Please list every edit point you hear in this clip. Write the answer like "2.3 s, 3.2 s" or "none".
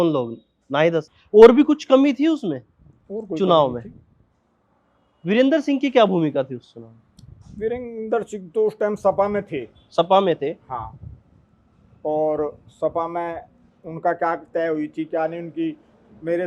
1.2 s